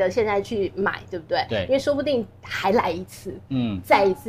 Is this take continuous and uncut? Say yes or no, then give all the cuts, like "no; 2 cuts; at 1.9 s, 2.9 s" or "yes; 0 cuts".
yes; 0 cuts